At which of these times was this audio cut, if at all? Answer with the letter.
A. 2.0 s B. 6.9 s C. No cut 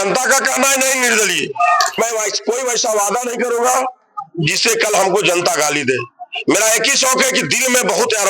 A